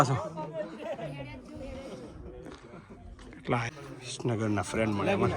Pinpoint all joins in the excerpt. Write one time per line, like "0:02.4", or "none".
0:03.7